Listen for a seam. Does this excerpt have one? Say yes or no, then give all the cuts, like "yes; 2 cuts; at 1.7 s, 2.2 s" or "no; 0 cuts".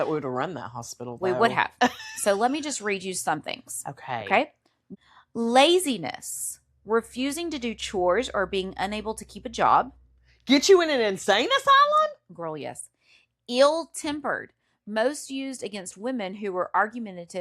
yes; 1 cut; at 4.8 s